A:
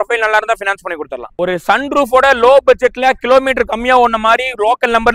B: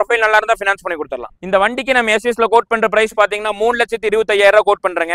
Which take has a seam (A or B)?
B